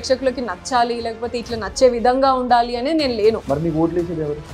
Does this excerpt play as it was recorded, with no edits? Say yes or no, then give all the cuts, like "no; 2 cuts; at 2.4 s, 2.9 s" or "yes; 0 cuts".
yes; 0 cuts